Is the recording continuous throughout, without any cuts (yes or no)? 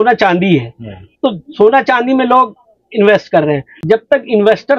no